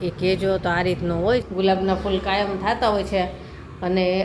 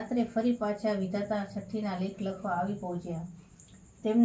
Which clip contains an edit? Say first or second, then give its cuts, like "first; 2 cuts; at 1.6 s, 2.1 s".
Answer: first; 1 cut; at 1.5 s